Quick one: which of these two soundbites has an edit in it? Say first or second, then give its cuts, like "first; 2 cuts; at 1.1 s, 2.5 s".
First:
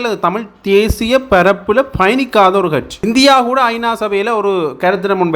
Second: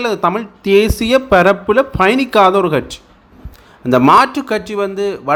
first; 1 cut; at 3.0 s